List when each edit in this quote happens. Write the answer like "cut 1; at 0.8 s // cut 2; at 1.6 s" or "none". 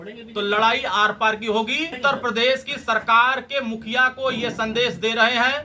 cut 1; at 2.0 s